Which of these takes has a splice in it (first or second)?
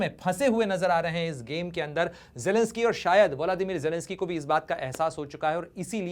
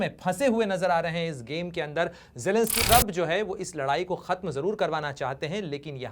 second